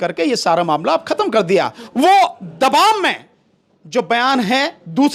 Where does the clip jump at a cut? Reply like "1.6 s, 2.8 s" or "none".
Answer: 1.8 s